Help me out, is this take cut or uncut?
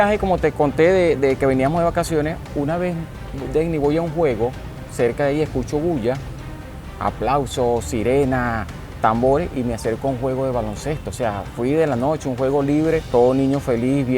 cut